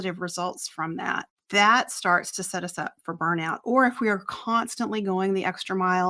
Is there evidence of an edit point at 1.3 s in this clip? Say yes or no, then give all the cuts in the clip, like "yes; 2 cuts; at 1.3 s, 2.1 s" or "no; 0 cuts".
yes; 1 cut; at 1.3 s